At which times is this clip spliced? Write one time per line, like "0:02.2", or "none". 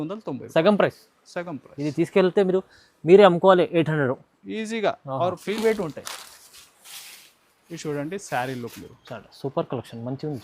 0:05.6